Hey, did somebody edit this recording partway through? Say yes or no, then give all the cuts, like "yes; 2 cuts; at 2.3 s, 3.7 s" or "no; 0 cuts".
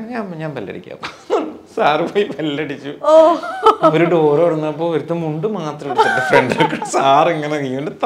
no; 0 cuts